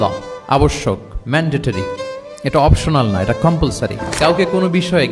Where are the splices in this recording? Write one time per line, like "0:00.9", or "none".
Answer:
0:02.3
0:04.1

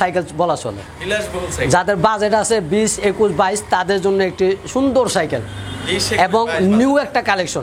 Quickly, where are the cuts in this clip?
none

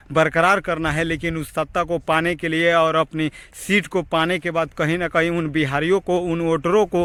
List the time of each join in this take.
none

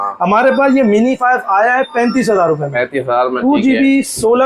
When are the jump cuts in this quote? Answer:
0:03.4

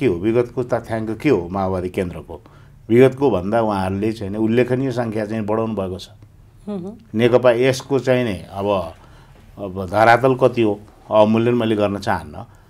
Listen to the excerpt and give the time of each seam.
none

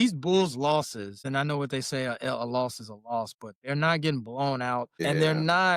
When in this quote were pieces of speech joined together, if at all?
0:01.2
0:04.9

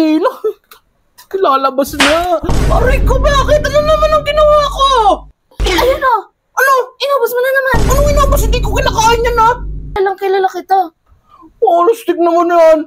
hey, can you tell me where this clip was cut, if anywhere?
0:09.9

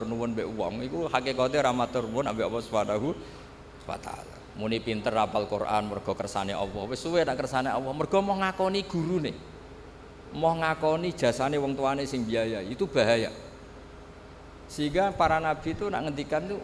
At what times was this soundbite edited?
0:04.4

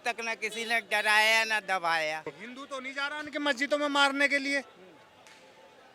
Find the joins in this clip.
0:02.4

